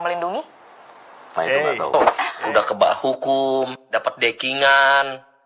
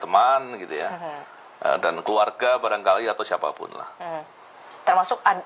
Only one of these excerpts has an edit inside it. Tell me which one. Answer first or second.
first